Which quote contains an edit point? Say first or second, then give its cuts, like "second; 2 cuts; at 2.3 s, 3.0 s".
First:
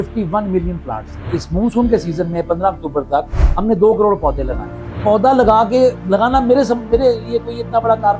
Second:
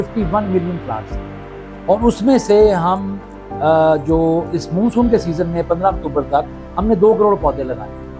first; 3 cuts; at 1.4 s, 5.0 s, 6.0 s